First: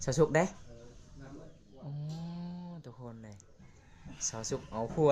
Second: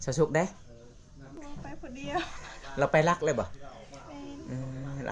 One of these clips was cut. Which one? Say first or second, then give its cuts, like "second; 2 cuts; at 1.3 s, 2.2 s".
second; 1 cut; at 1.3 s